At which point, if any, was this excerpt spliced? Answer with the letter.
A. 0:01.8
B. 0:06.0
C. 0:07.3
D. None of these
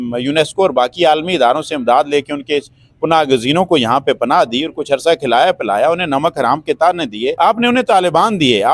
C